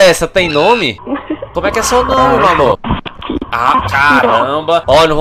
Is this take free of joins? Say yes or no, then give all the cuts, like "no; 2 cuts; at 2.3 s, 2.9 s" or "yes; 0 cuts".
no; 2 cuts; at 1.5 s, 3.5 s